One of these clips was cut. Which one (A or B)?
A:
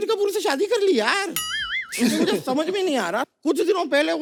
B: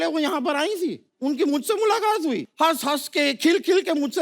B